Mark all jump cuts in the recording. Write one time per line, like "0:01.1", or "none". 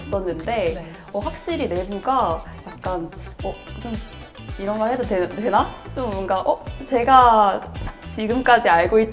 none